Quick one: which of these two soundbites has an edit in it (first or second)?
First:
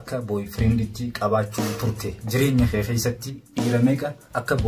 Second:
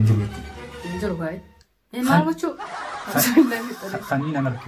first